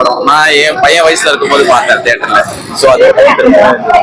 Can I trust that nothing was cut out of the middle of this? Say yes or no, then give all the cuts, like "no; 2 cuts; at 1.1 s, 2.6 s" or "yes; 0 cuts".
yes; 0 cuts